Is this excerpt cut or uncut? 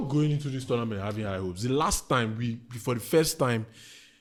uncut